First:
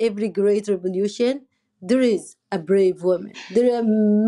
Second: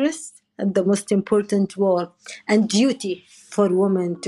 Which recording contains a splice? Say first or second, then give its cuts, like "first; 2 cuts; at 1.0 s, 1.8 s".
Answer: first; 1 cut; at 3.3 s